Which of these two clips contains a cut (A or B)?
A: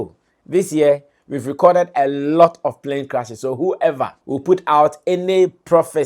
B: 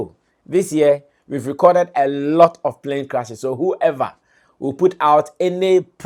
A